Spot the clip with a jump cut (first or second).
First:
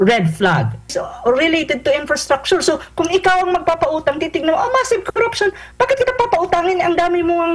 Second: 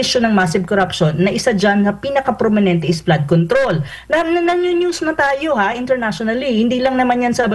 first